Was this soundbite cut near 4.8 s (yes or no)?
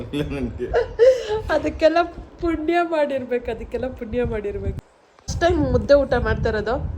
yes